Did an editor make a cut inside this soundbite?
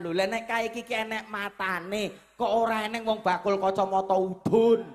no; 0 cuts

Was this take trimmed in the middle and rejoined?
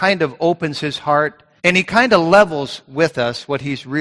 yes; 1 cut; at 1.4 s

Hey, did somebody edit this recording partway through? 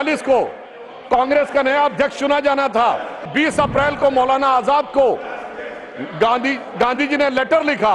yes; 1 cut; at 3.3 s

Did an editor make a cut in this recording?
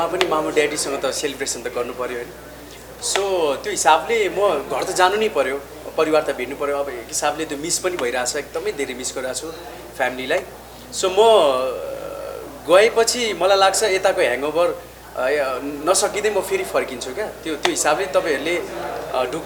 no; 0 cuts

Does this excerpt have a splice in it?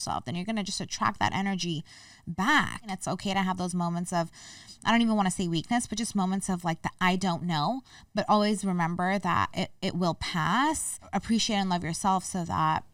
yes; 2 cuts; at 3.0 s, 10.9 s

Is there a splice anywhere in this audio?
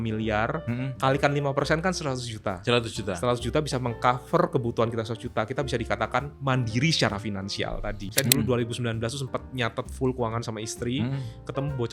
yes; 1 cut; at 8.1 s

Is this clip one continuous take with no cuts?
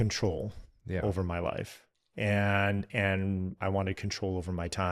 yes; 0 cuts

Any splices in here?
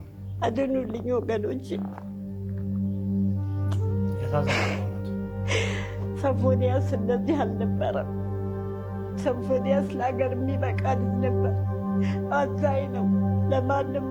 no; 0 cuts

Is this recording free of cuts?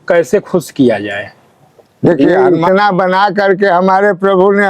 no; 1 cut; at 2.2 s

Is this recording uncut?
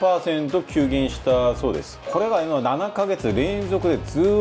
yes; 0 cuts

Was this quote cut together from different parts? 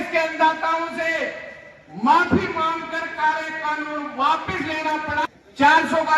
yes; 1 cut; at 5.2 s

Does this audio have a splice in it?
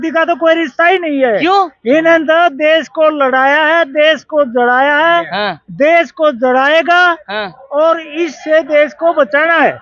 no; 0 cuts

